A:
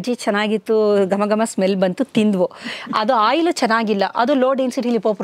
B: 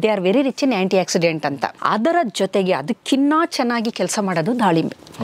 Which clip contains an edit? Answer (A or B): B